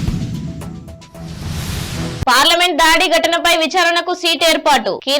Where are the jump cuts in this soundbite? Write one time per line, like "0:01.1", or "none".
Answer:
0:02.2